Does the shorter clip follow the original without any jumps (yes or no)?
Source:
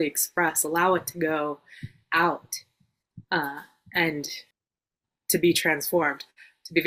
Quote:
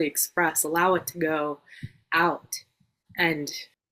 no